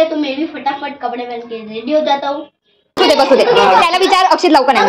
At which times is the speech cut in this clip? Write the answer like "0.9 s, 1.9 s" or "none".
3.0 s